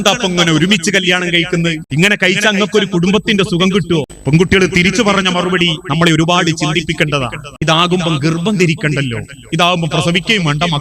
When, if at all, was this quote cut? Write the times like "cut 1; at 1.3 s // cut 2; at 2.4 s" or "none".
cut 1; at 1.8 s // cut 2; at 4.1 s // cut 3; at 7.5 s